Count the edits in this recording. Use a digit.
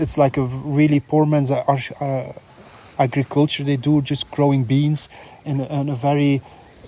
0